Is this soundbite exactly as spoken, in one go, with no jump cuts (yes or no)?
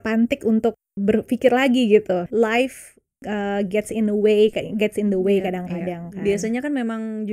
no